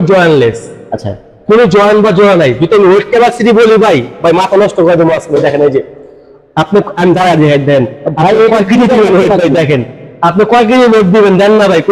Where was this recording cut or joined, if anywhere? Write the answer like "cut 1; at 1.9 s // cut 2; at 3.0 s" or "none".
none